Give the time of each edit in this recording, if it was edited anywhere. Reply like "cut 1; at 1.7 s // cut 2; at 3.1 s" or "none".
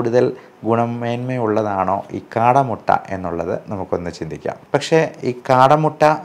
cut 1; at 4.5 s

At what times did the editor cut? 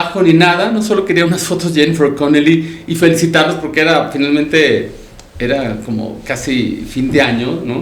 none

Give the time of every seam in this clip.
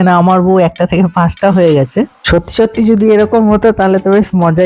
none

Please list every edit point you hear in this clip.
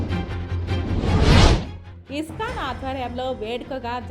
cut 1; at 1.7 s

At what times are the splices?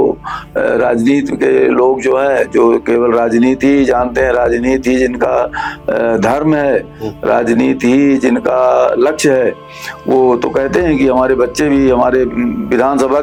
none

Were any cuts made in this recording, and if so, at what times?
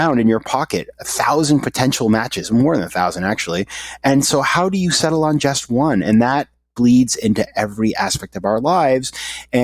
none

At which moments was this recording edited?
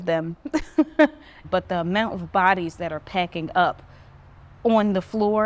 cut 1; at 1.3 s

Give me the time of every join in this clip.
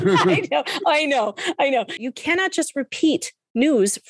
cut 1; at 2.0 s

